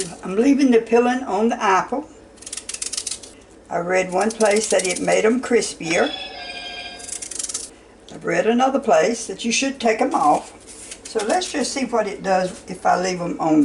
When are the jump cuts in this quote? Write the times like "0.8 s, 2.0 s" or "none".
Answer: 3.3 s, 7.7 s